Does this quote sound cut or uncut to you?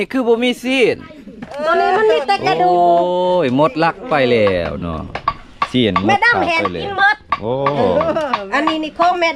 uncut